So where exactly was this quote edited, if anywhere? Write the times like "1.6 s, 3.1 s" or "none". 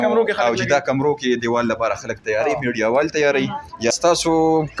3.9 s